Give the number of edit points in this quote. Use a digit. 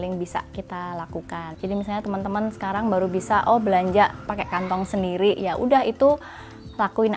2